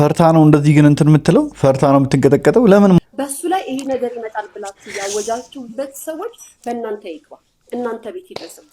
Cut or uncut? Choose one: cut